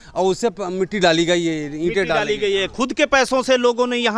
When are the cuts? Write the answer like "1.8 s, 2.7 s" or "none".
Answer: none